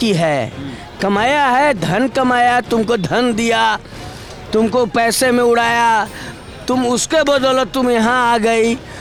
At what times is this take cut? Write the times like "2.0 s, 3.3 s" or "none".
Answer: none

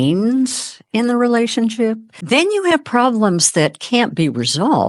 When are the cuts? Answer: 2.1 s

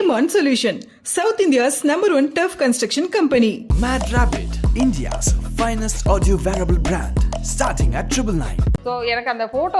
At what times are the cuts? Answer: 8.7 s

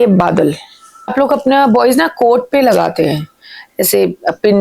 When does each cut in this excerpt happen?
1.1 s

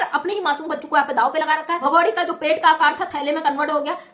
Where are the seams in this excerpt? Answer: 1.8 s

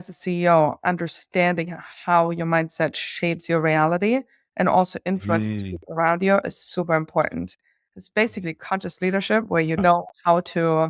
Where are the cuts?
9.4 s

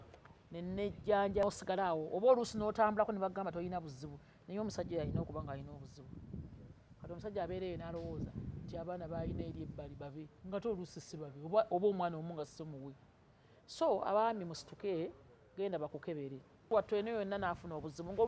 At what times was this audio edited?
1.4 s, 16.7 s

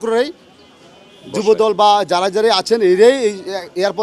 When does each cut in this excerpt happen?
none

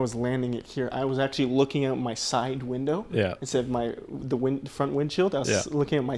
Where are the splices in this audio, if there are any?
none

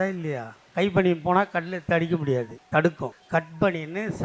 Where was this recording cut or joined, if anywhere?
2.6 s, 3.1 s

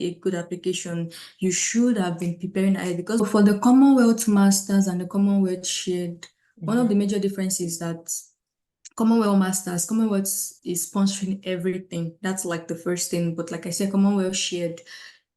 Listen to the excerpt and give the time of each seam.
3.2 s

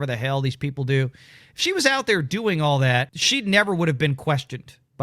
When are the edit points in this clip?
3.2 s

